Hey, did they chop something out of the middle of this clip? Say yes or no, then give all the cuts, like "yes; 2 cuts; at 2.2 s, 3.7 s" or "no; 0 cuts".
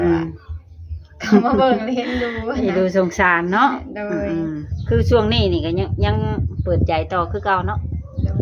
yes; 1 cut; at 4.7 s